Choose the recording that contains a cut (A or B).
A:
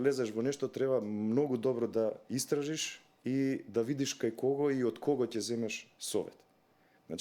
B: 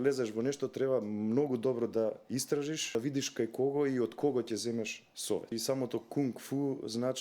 B